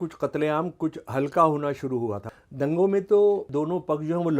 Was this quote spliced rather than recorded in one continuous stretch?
yes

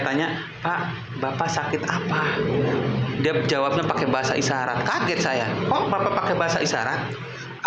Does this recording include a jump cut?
no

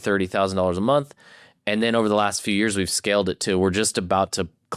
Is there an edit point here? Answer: no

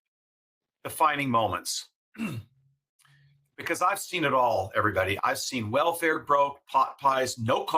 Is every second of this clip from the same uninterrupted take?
no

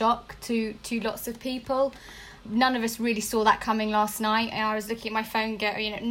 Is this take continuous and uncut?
yes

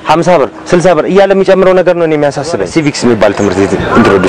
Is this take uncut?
no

